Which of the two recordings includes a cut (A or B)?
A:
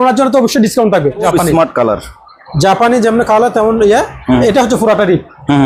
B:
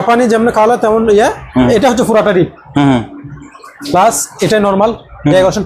A